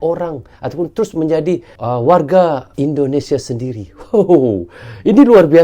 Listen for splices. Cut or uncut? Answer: cut